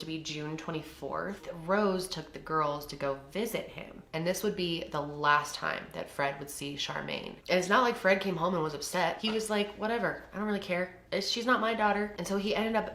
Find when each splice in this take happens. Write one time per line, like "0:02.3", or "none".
0:01.4
0:07.3
0:09.2
0:11.0